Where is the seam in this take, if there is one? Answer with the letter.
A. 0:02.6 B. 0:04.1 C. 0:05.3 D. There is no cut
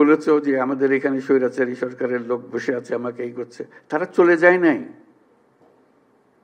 D